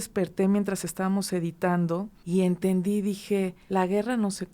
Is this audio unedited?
no; 2 cuts; at 2.2 s, 3.6 s

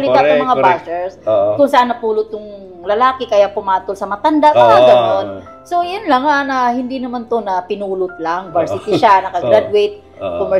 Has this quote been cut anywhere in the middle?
no; 0 cuts

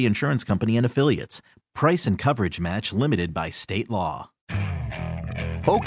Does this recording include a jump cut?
yes; 1 cut; at 4.4 s

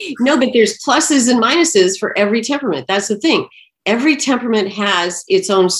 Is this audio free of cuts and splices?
yes; 0 cuts

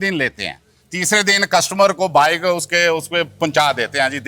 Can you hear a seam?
no; 0 cuts

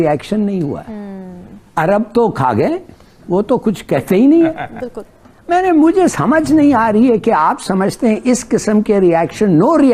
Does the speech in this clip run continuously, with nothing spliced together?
yes; 0 cuts

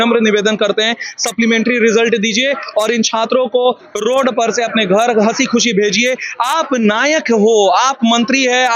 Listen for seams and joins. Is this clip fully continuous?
yes; 0 cuts

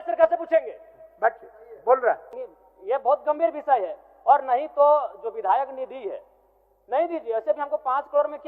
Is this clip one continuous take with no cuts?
no; 1 cut; at 2.3 s

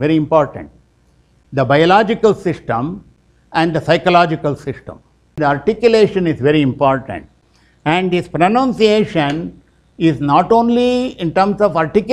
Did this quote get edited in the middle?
yes; 1 cut; at 5.4 s

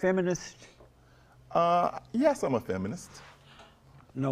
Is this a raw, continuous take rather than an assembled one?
yes; 0 cuts

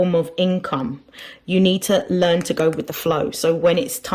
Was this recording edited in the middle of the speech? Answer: yes; 1 cut; at 2.9 s

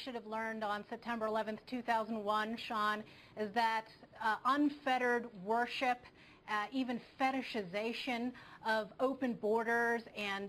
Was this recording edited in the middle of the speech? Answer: yes; 1 cut; at 5.3 s

